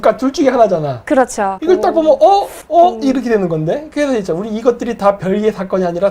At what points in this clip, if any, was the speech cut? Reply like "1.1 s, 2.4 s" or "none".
1.5 s, 2.6 s